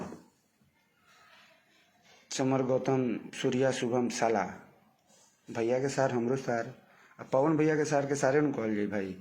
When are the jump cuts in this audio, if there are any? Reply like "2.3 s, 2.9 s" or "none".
none